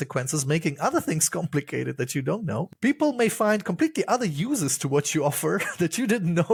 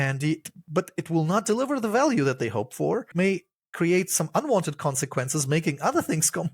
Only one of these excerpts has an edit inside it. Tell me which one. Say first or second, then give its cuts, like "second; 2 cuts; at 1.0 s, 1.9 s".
second; 1 cut; at 3.1 s